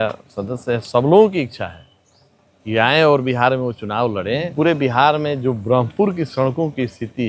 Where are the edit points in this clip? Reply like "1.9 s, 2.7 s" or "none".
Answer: 4.5 s